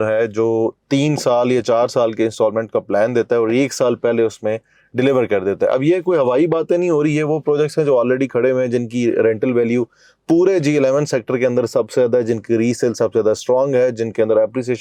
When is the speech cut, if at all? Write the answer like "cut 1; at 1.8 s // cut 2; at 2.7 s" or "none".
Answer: none

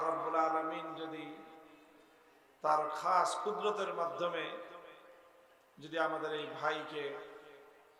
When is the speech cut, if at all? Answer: none

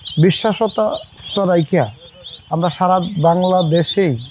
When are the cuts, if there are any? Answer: none

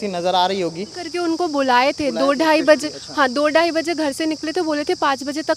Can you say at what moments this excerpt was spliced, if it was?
cut 1; at 0.9 s

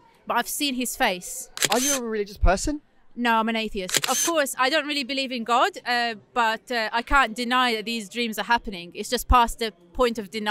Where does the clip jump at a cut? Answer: cut 1; at 1.6 s // cut 2; at 3.9 s

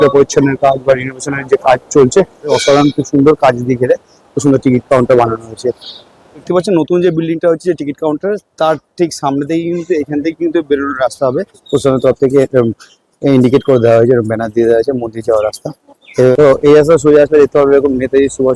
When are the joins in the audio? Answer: cut 1; at 2.6 s // cut 2; at 6.4 s // cut 3; at 11.5 s // cut 4; at 16.3 s

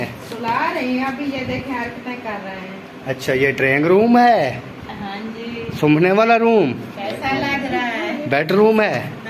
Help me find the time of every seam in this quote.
none

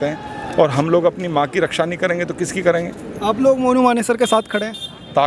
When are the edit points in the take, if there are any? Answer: none

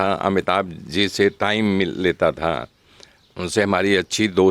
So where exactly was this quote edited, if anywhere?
none

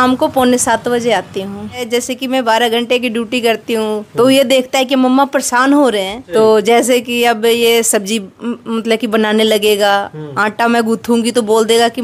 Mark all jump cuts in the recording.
cut 1; at 1.8 s // cut 2; at 6.2 s

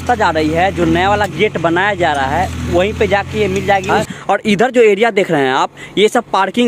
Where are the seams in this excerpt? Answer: cut 1; at 4.0 s

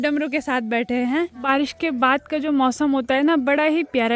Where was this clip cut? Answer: cut 1; at 1.5 s

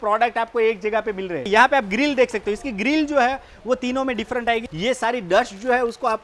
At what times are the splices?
cut 1; at 1.5 s // cut 2; at 4.7 s

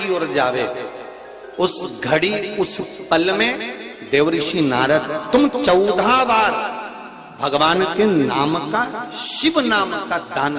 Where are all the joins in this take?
none

